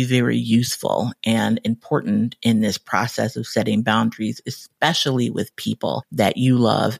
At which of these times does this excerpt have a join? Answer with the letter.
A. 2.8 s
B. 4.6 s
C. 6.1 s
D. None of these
C